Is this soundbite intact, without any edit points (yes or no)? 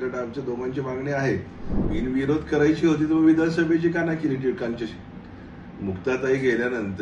no